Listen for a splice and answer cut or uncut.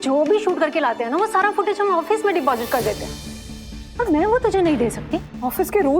uncut